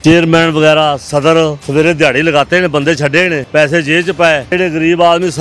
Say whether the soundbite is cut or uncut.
cut